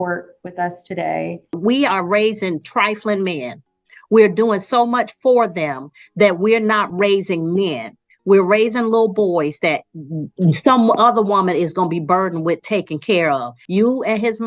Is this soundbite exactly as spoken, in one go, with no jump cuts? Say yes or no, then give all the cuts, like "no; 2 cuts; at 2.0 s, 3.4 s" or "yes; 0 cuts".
no; 2 cuts; at 1.6 s, 13.6 s